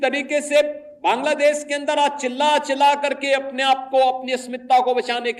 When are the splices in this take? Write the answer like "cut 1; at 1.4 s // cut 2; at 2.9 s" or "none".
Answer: none